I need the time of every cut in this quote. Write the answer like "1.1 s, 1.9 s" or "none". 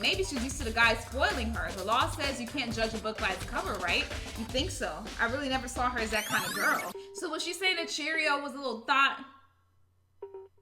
7.0 s